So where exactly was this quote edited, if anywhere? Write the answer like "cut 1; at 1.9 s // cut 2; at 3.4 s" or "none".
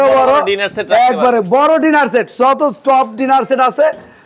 none